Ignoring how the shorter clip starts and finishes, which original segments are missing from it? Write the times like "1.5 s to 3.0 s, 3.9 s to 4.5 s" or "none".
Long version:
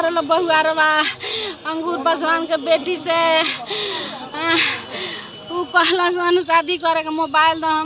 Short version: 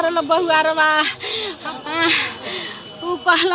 1.6 s to 4.1 s